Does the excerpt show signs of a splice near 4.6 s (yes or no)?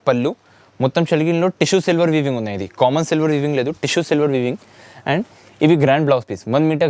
no